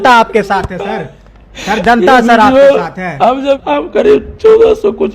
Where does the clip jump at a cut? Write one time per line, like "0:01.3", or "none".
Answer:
0:03.6